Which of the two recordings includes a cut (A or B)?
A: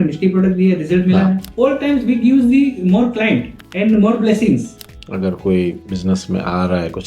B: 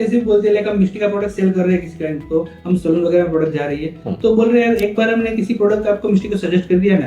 A